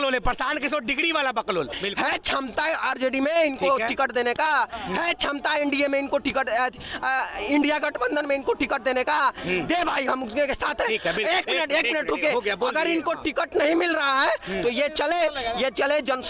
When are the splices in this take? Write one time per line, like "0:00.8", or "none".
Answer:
0:01.7